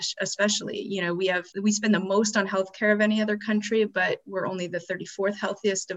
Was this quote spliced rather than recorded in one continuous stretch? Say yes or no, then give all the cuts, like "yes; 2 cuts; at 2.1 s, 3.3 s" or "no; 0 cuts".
yes; 1 cut; at 1.5 s